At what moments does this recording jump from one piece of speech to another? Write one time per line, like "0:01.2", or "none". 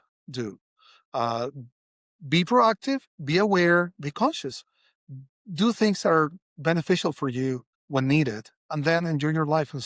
0:07.7